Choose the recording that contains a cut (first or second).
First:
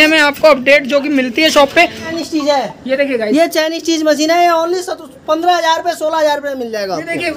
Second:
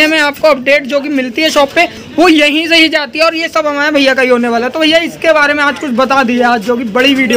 first